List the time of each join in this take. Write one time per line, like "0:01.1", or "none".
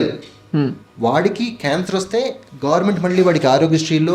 none